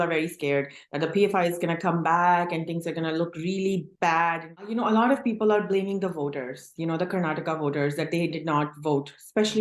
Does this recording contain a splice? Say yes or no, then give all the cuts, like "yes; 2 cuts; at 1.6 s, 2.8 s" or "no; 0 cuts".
yes; 1 cut; at 4.5 s